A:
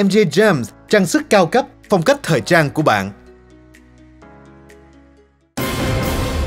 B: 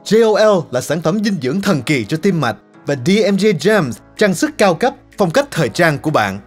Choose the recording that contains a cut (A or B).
A